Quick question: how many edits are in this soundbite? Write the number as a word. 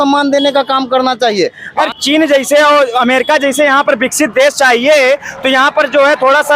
one